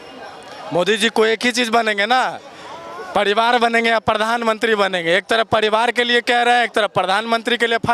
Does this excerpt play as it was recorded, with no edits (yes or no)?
yes